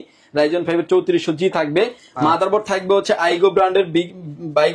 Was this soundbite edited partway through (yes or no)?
no